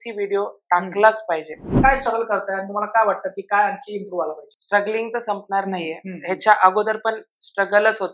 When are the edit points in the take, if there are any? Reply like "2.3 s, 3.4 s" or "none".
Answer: 1.8 s, 4.5 s